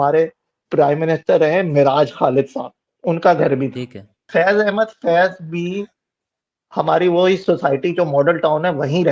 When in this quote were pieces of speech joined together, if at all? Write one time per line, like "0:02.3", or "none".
0:04.2